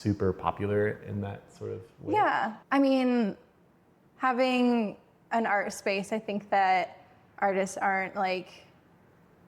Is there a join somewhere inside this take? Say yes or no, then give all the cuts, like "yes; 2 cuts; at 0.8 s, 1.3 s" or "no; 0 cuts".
yes; 1 cut; at 2.6 s